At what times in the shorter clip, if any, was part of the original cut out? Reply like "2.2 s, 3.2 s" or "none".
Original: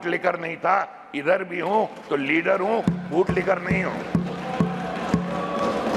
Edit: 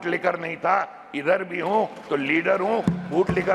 none

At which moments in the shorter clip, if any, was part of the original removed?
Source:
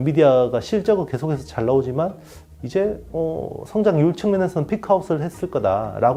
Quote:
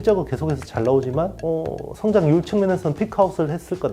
1.4 s

